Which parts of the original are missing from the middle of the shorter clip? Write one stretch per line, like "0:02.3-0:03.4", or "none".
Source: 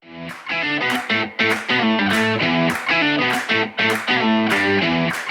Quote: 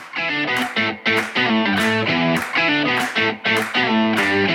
none

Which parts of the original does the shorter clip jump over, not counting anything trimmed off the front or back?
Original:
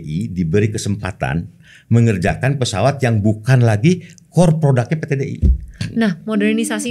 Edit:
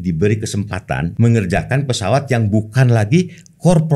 0:01.4-0:01.8

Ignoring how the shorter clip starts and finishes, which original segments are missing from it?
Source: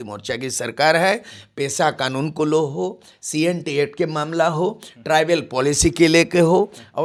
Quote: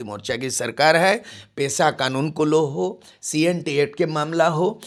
none

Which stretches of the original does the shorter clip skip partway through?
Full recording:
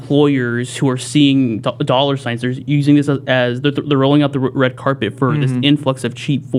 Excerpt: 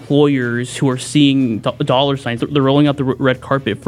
0:02.4-0:03.8

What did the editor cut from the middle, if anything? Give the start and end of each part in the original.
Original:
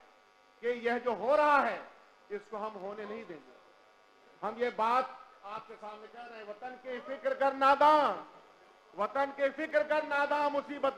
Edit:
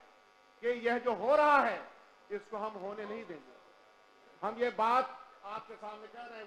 none

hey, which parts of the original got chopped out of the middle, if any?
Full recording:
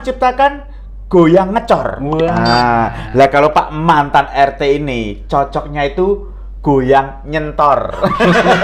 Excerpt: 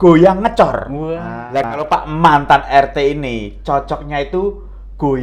0:02.3-0:02.8

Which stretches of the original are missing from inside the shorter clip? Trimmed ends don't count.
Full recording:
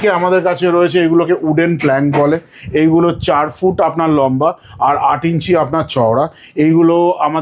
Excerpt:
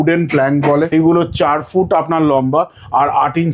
0:02.4-0:02.8

